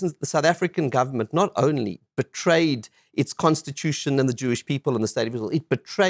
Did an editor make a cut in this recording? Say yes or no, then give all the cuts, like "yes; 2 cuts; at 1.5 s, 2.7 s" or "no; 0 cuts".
no; 0 cuts